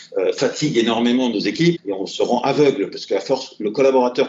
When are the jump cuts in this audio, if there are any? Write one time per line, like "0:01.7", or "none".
0:01.8